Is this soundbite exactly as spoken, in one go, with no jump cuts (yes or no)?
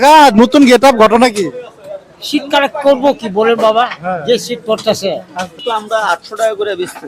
no